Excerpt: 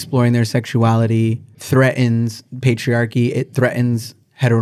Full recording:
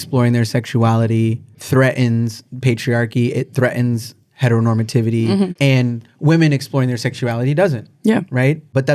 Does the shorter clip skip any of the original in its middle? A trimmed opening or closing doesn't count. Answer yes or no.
no